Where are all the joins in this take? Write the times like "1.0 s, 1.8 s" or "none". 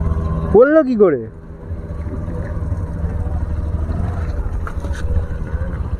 none

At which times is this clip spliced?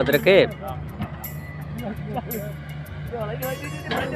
none

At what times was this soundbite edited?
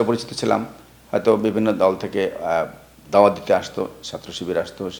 none

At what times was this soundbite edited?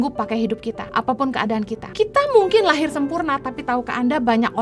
0.8 s, 1.9 s

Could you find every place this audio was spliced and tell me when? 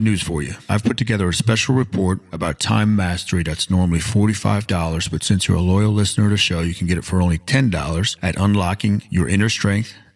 none

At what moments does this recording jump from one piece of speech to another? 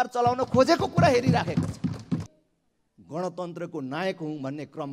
2.3 s

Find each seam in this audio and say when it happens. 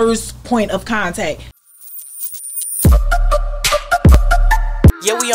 1.6 s

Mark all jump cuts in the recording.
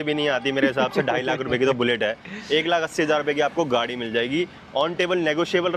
none

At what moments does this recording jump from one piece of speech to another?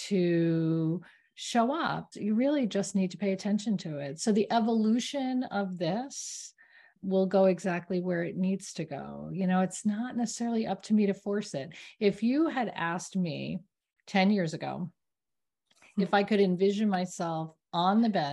2.1 s, 7.0 s

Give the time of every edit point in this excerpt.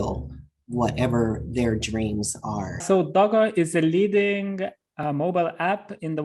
2.8 s

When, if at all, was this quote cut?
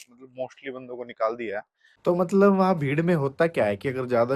2.1 s

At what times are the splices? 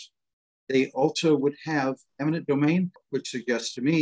3.0 s

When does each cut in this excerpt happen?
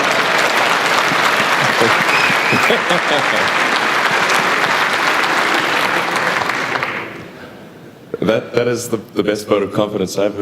7.6 s

